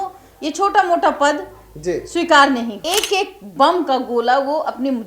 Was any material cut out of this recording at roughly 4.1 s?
no; 1 cut; at 2.8 s

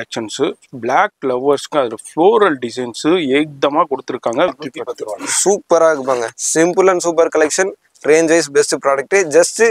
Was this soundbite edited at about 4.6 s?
yes; 1 cut; at 4.6 s

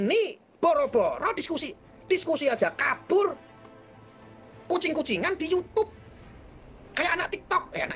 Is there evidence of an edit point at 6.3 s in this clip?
no; 0 cuts

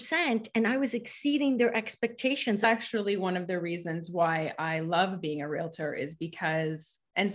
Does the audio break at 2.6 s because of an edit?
yes; 1 cut; at 2.6 s

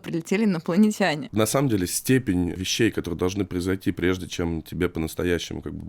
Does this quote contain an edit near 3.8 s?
no; 2 cuts; at 1.2 s, 2.6 s

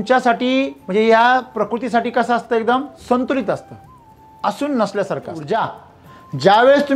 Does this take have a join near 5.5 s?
yes; 1 cut; at 5.5 s

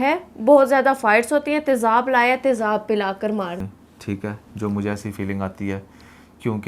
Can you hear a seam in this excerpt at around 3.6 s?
yes; 1 cut; at 3.6 s

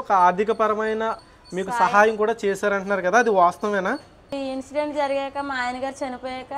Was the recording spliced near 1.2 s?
yes; 2 cuts; at 1.2 s, 4.3 s

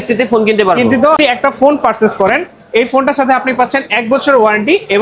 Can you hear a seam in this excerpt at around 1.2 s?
yes; 1 cut; at 1.2 s

